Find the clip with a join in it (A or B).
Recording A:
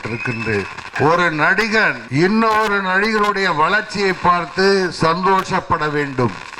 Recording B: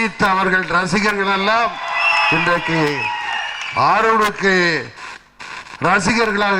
A